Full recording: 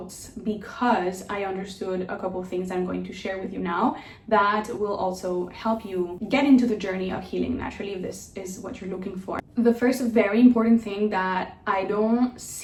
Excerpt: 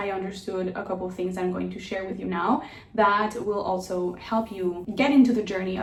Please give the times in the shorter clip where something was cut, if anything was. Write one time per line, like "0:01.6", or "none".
none